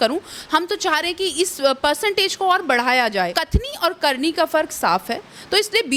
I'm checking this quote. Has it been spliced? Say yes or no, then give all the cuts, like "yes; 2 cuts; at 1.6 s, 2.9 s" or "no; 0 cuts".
yes; 1 cut; at 3.3 s